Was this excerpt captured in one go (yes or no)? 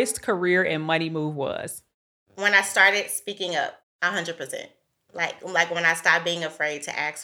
yes